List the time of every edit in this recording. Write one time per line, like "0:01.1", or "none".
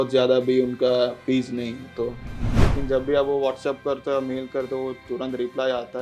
0:02.4